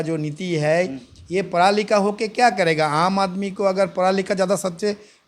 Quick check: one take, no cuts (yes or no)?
yes